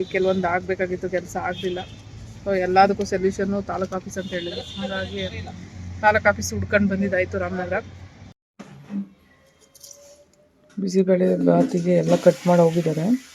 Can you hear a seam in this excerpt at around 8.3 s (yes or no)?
yes